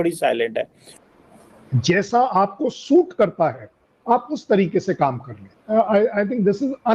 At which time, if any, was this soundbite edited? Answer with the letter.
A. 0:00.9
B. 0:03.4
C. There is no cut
A